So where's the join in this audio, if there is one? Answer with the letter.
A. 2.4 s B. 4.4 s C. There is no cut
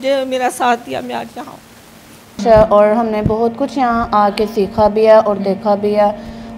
A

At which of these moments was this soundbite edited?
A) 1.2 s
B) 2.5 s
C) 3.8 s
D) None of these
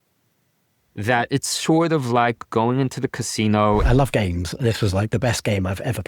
C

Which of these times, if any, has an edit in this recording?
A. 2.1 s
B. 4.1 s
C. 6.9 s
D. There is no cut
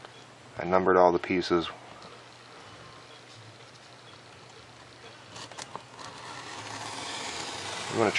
D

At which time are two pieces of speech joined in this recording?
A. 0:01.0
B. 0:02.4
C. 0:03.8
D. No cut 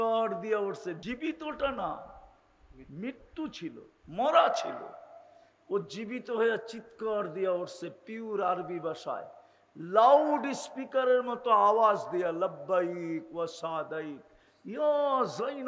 A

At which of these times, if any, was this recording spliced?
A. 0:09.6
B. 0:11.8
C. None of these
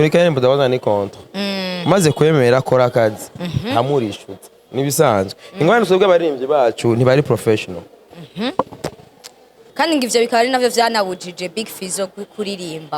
A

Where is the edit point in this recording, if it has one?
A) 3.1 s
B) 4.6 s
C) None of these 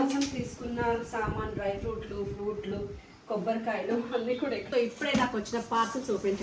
B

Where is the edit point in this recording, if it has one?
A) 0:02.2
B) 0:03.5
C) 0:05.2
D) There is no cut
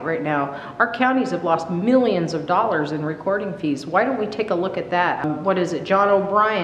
C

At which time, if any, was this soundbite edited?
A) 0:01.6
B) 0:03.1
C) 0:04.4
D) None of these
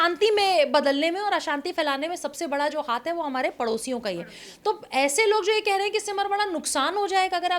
D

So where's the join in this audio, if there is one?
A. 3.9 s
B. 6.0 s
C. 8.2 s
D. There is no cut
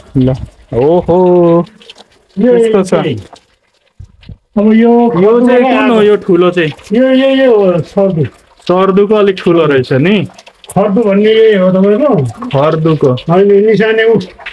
D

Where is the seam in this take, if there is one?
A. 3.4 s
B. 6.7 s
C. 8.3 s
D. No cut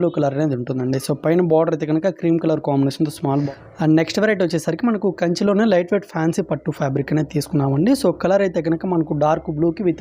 A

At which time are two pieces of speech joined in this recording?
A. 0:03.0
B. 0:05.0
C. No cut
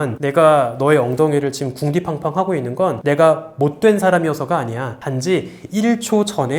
C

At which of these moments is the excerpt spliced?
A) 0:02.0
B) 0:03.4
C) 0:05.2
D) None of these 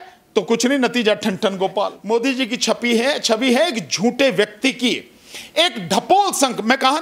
A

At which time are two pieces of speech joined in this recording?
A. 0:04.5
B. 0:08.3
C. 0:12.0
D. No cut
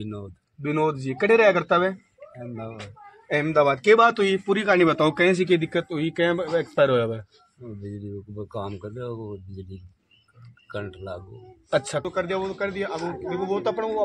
C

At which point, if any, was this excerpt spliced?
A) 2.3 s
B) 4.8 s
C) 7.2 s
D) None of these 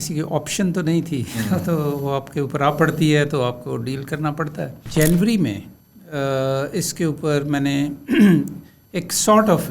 B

